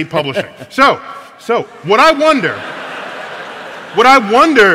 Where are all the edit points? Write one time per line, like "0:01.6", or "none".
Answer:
0:01.4